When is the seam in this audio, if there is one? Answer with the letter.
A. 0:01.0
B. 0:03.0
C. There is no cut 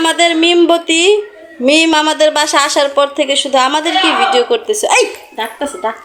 C